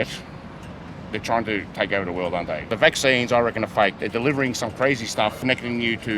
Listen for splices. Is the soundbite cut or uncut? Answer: cut